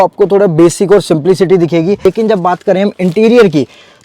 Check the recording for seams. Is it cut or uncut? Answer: cut